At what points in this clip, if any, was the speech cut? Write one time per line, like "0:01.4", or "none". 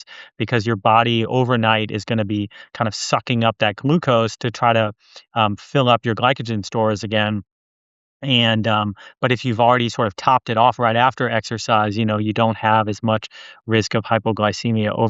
none